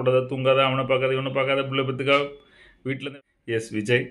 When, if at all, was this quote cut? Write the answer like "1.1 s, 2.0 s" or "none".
3.0 s

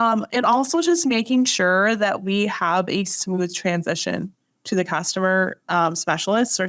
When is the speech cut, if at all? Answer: none

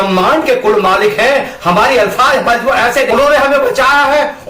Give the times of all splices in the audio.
3.1 s

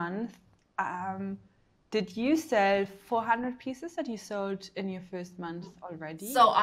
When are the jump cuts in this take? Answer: 3.0 s

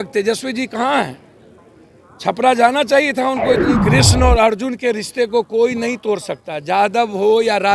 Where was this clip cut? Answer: 3.7 s

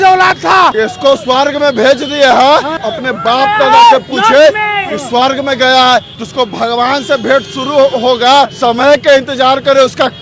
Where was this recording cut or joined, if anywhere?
0.7 s, 2.9 s, 6.1 s, 8.5 s

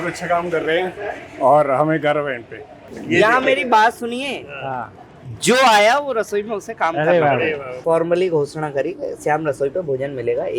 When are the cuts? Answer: 2.9 s, 7.7 s

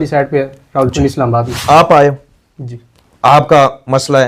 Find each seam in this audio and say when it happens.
1.5 s

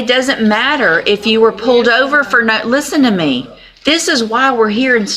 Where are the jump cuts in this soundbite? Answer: none

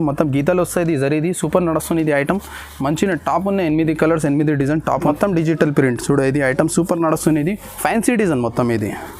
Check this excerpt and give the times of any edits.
5.0 s

